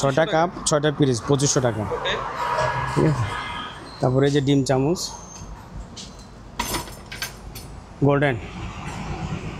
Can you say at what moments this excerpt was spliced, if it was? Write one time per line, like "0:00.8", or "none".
none